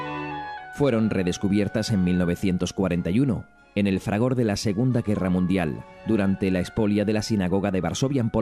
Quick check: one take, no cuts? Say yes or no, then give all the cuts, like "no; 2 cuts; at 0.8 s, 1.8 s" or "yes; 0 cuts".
no; 1 cut; at 6.8 s